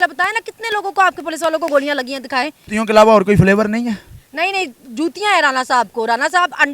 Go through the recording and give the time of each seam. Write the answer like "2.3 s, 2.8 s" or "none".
2.6 s